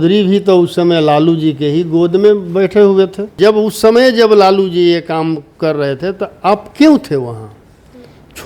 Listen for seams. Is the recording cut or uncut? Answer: cut